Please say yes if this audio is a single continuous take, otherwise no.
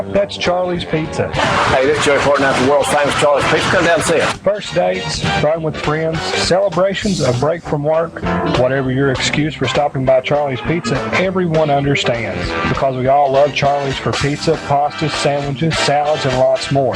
yes